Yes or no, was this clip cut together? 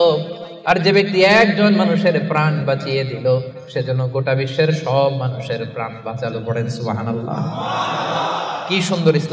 no